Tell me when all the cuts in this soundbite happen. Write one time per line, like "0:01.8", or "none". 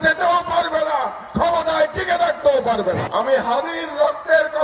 0:03.0